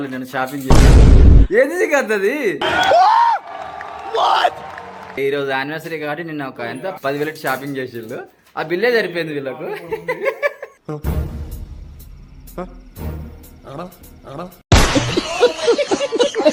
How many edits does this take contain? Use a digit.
0